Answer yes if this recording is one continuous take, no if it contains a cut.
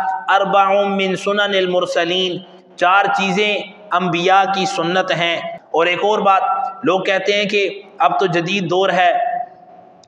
no